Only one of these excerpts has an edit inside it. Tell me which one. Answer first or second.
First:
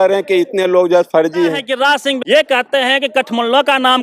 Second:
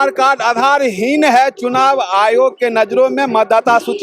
first